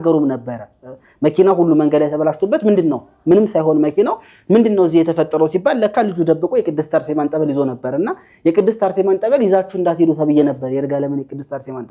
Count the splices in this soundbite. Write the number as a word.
zero